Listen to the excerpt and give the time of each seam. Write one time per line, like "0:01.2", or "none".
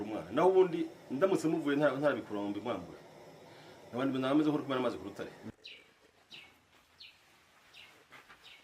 0:05.5